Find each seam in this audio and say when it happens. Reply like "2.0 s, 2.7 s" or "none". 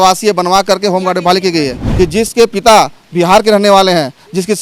1.8 s